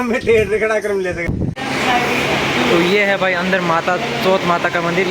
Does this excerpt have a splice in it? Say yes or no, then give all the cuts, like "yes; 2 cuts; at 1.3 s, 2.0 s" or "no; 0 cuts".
yes; 1 cut; at 1.3 s